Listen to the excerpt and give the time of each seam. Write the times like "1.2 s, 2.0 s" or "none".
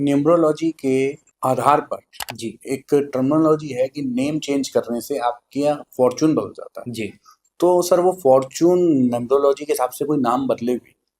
1.3 s